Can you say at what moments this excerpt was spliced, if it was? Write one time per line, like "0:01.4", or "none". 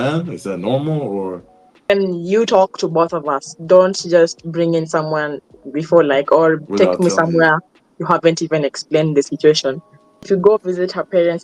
0:01.9
0:10.3